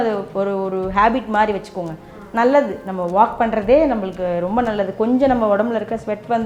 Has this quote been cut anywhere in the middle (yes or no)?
no